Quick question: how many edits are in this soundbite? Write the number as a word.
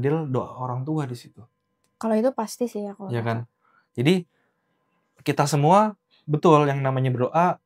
zero